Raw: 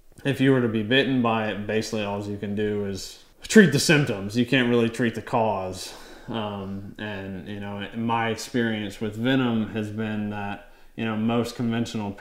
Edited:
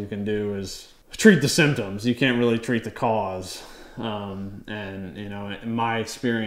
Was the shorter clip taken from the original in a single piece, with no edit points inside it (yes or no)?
yes